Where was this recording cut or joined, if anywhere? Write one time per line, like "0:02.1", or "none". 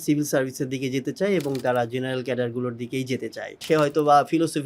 0:03.6